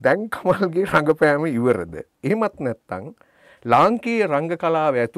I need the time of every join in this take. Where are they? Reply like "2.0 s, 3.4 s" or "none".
none